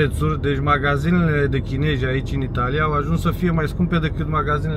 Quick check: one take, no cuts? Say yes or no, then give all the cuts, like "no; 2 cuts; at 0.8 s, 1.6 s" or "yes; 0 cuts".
yes; 0 cuts